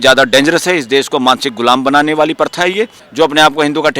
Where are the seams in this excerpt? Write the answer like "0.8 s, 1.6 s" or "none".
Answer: 3.0 s